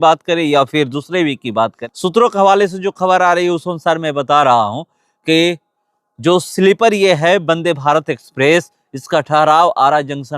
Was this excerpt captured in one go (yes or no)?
no